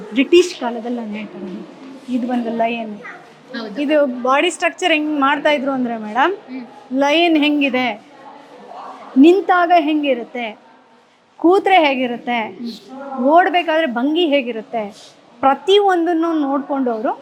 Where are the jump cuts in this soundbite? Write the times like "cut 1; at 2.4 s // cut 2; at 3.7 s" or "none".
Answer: none

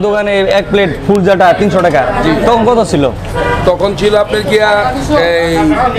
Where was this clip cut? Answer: none

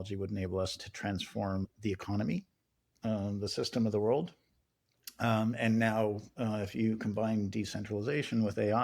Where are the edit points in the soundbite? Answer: cut 1; at 0.8 s // cut 2; at 1.7 s

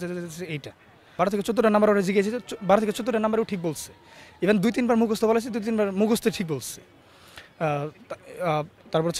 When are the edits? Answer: cut 1; at 1.1 s

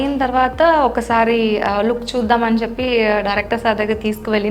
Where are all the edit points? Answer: none

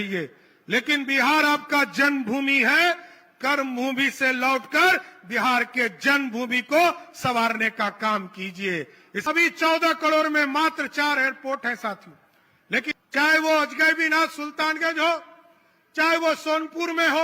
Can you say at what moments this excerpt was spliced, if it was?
cut 1; at 9.0 s // cut 2; at 12.9 s

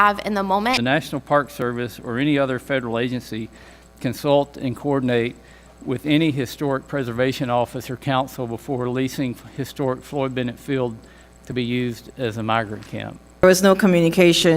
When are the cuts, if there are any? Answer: cut 1; at 0.8 s // cut 2; at 13.4 s

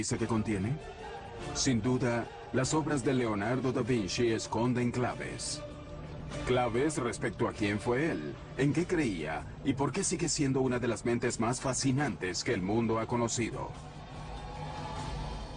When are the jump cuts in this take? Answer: cut 1; at 5.4 s

